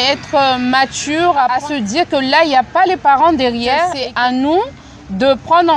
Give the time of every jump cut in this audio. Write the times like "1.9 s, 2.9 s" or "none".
1.6 s, 4.0 s